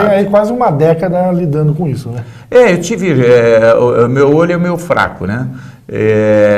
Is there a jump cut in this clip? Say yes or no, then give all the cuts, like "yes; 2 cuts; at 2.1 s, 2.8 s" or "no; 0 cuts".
no; 0 cuts